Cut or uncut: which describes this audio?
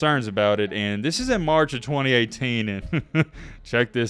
uncut